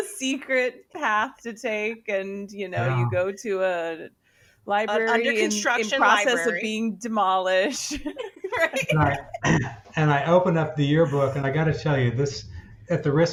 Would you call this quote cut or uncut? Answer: uncut